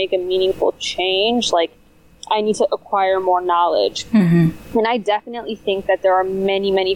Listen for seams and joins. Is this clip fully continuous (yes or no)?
yes